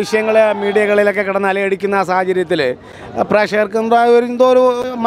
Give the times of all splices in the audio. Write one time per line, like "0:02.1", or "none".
none